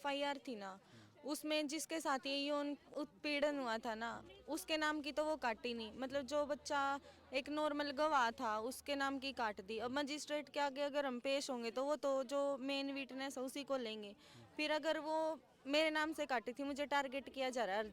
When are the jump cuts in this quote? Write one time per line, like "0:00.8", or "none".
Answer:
0:02.9